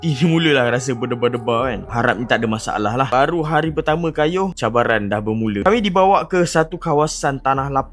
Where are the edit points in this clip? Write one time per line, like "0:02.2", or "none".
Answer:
0:05.6